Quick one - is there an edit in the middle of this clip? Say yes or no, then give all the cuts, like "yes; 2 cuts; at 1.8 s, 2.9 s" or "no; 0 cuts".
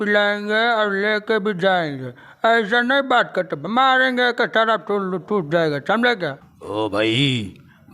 yes; 1 cut; at 6.5 s